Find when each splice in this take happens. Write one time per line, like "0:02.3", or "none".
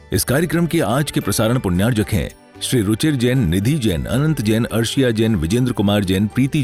none